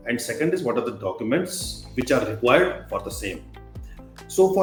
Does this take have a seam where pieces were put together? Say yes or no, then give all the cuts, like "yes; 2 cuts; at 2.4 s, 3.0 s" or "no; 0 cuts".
no; 0 cuts